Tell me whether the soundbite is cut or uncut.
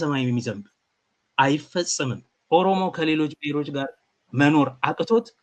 cut